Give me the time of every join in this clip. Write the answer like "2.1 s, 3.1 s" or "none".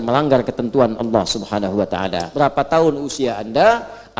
2.2 s